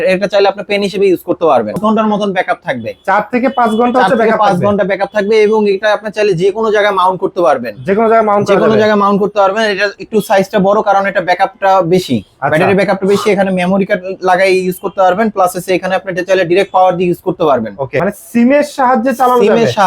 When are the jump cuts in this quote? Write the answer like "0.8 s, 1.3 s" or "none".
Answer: 1.8 s, 17.9 s